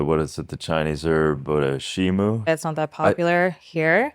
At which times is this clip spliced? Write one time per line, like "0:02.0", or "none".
0:02.5